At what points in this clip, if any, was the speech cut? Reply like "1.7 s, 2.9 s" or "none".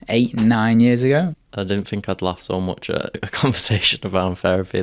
1.4 s